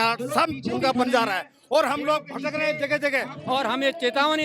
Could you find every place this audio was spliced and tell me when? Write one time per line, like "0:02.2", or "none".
0:03.4